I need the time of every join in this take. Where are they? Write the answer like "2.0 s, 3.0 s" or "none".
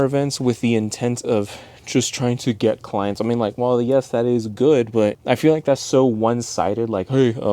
5.2 s